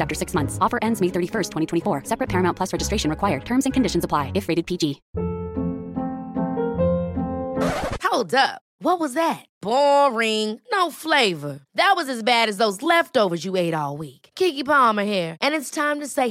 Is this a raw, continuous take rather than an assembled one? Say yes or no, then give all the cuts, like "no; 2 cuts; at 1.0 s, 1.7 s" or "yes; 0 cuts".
no; 1 cut; at 5.1 s